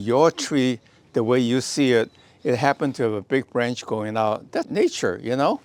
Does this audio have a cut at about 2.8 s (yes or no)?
no